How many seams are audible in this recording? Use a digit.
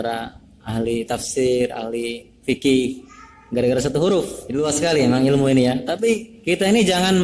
2